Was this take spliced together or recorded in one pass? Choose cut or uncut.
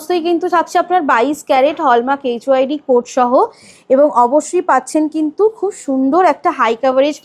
uncut